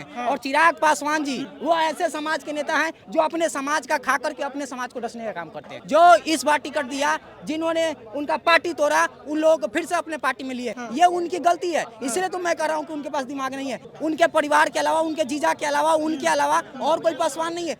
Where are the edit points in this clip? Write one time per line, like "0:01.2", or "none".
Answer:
0:01.5
0:05.7
0:10.8
0:13.8